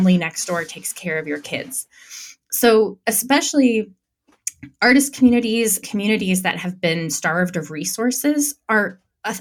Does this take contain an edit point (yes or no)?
no